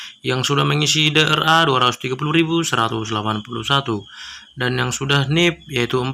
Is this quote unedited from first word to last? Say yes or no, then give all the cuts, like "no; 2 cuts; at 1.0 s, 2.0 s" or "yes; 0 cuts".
yes; 0 cuts